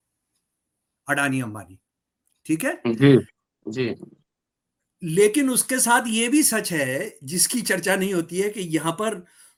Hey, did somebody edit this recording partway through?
no; 0 cuts

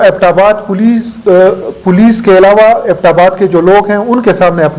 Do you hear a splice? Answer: no; 0 cuts

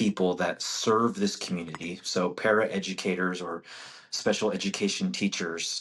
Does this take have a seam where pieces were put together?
no; 0 cuts

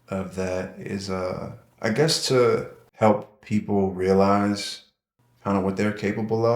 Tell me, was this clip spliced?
yes; 1 cut; at 2.8 s

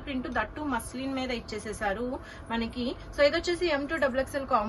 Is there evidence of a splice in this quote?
no; 0 cuts

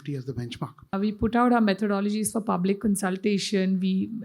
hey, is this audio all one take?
no; 1 cut; at 0.9 s

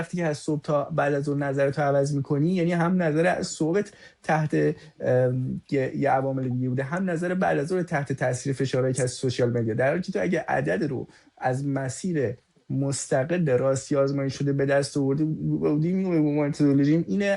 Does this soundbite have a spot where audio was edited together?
no; 0 cuts

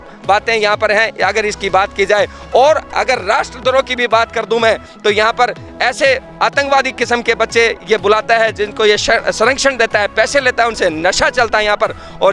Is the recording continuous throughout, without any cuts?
yes; 0 cuts

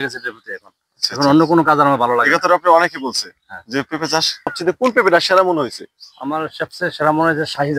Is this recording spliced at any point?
yes; 1 cut; at 4.6 s

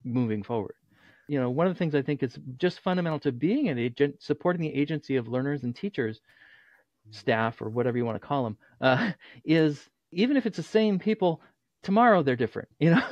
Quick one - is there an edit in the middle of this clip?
yes; 2 cuts; at 1.2 s, 10.1 s

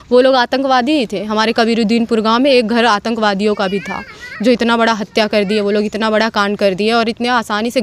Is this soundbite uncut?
yes; 0 cuts

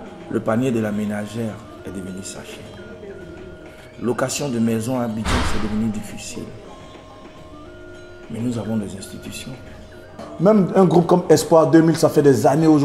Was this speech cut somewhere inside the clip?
yes; 1 cut; at 10.2 s

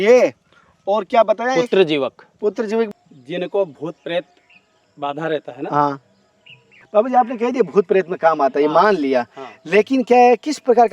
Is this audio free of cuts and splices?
no; 1 cut; at 2.9 s

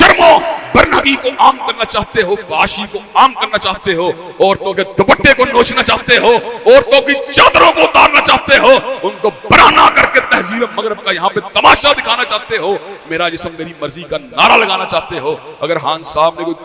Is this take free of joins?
yes; 0 cuts

